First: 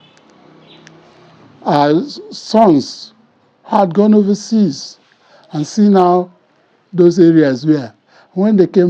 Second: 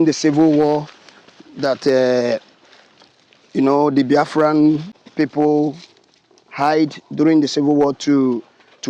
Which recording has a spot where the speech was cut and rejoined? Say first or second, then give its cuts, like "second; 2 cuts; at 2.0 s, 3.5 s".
second; 1 cut; at 5.0 s